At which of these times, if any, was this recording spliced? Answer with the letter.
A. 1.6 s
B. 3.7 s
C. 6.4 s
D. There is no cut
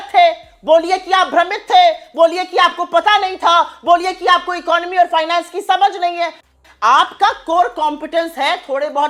D